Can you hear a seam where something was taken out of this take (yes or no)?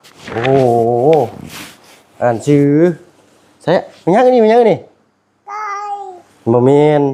no